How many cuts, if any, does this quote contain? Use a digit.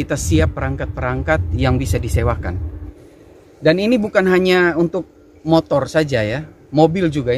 1